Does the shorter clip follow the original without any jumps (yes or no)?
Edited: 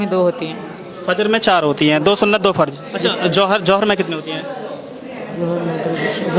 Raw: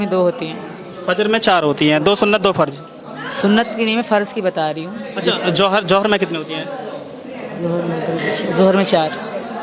no